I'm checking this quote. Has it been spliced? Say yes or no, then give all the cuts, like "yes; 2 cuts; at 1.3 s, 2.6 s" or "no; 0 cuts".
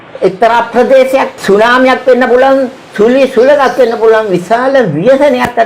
yes; 1 cut; at 1.3 s